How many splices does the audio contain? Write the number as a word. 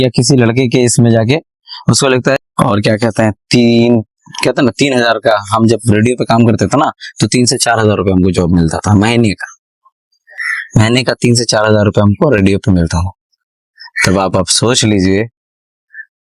one